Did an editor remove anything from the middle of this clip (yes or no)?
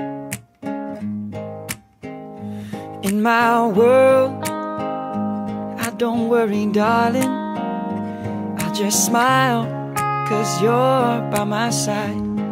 yes